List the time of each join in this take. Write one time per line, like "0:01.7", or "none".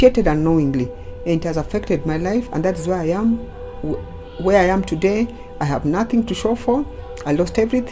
none